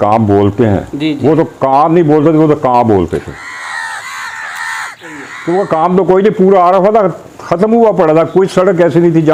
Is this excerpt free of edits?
yes; 0 cuts

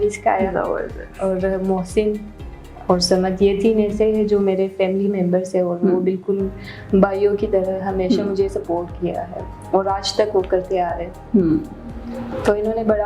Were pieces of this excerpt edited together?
no; 0 cuts

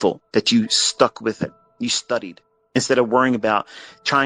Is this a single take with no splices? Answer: no; 2 cuts; at 1.6 s, 2.8 s

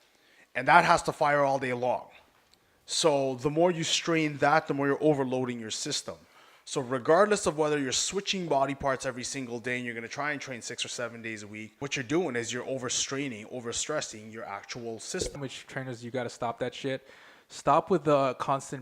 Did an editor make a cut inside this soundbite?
yes; 1 cut; at 15.4 s

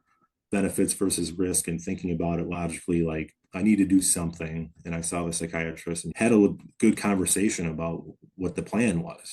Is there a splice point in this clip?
yes; 1 cut; at 6.0 s

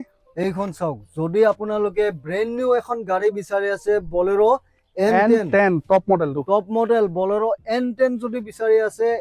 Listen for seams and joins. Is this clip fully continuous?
yes; 0 cuts

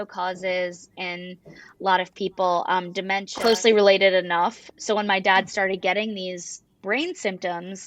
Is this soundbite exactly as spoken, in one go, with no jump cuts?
no; 1 cut; at 3.3 s

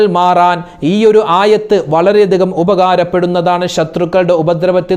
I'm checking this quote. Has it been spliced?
no; 0 cuts

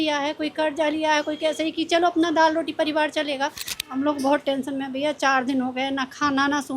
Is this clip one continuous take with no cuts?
no; 1 cut; at 3.7 s

